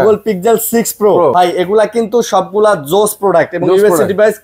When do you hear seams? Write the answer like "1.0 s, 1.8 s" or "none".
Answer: 1.3 s